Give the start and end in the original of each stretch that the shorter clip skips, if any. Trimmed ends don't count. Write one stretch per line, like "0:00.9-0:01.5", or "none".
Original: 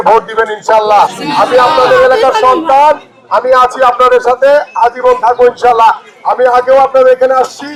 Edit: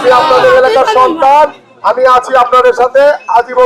none

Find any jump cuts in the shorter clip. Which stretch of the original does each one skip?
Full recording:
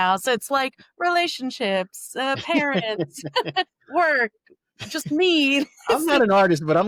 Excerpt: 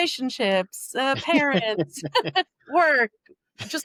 none

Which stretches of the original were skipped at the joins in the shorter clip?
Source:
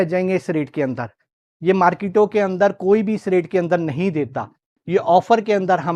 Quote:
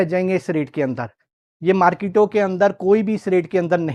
none

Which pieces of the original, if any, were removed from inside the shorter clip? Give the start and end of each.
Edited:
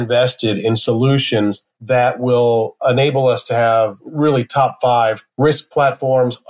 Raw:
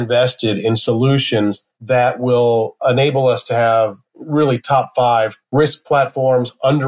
0:04.0-0:04.2

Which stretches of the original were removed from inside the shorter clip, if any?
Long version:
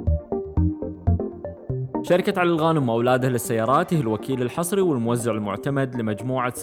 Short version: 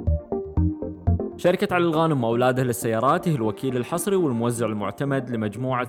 0:01.4-0:02.0

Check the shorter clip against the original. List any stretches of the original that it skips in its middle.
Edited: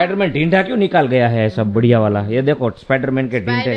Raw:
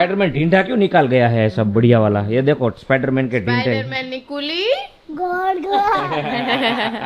none

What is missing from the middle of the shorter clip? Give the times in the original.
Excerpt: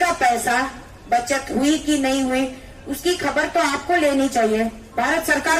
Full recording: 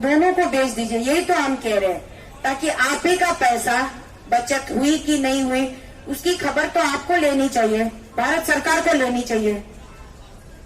none

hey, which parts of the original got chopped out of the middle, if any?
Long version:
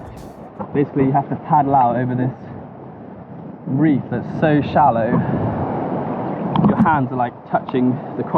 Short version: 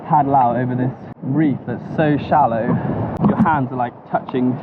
0:02.5-0:03.5
0:05.6-0:06.6

